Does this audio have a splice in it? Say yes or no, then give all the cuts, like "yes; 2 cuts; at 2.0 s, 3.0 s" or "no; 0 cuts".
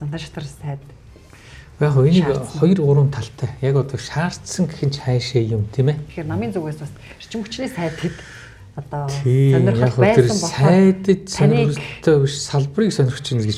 yes; 1 cut; at 6.1 s